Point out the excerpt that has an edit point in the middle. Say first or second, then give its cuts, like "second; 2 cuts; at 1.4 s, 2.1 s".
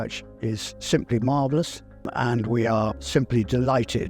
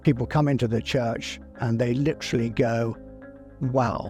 first; 2 cuts; at 2.1 s, 3.0 s